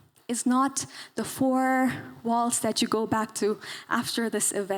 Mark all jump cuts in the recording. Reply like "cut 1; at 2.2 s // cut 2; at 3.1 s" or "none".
none